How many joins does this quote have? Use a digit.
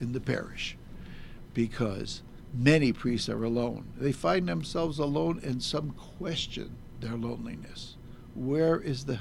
0